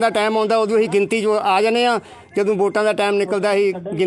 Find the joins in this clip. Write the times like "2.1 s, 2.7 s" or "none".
none